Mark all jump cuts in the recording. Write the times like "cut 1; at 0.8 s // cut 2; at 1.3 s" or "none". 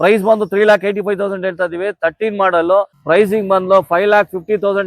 cut 1; at 3.0 s